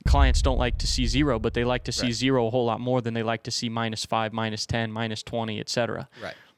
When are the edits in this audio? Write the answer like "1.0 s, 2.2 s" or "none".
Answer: none